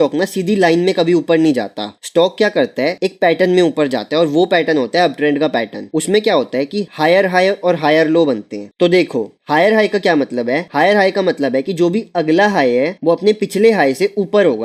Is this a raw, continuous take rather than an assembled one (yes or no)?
yes